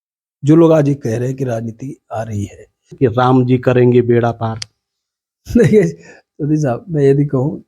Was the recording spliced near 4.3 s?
no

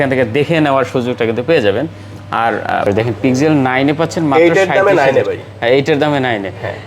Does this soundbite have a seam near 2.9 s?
yes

